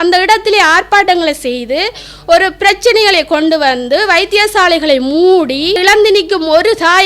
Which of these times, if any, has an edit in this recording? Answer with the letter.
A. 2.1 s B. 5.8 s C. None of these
B